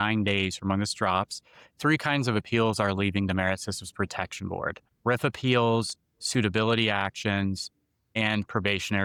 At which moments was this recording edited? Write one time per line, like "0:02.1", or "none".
none